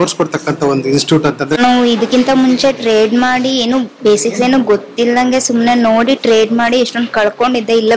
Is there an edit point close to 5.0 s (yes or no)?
no